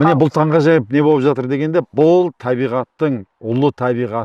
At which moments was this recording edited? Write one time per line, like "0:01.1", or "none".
none